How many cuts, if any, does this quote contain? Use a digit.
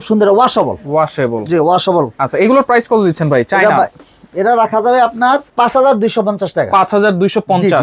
0